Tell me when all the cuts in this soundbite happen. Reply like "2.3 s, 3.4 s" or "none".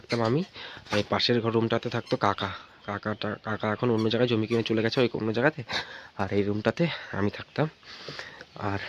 none